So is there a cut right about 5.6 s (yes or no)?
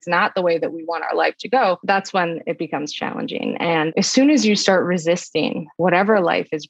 yes